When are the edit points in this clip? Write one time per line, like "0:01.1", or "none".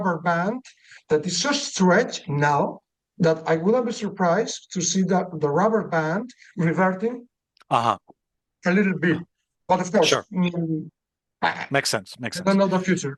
none